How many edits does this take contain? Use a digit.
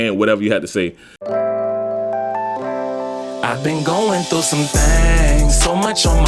1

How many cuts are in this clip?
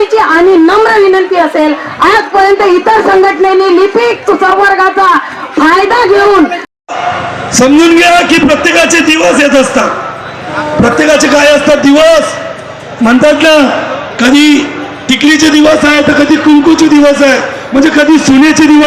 1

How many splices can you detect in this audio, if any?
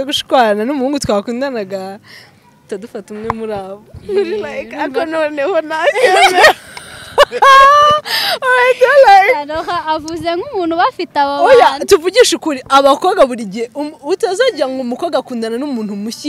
0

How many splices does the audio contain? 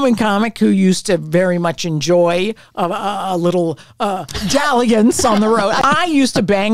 1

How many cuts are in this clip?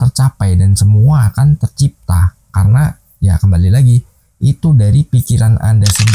0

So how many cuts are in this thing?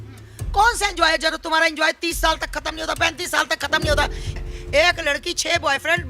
0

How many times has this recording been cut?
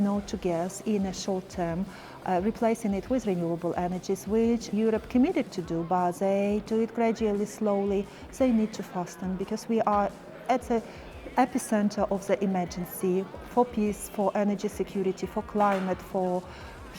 1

